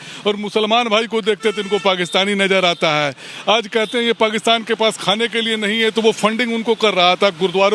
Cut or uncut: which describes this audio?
uncut